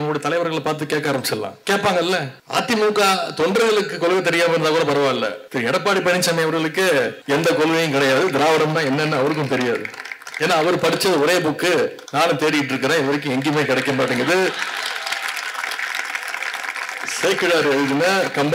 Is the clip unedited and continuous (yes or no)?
no